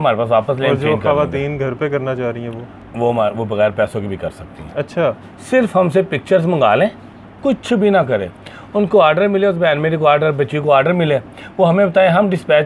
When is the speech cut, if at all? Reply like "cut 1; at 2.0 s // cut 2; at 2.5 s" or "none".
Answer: cut 1; at 2.8 s // cut 2; at 7.4 s